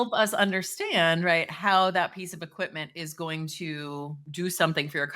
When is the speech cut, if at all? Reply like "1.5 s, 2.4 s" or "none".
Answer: 4.2 s